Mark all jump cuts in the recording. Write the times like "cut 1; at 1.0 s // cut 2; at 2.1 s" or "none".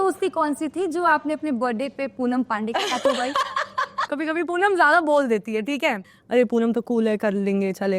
cut 1; at 4.1 s // cut 2; at 6.1 s